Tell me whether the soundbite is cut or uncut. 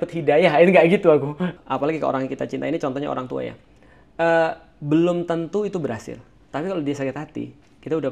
cut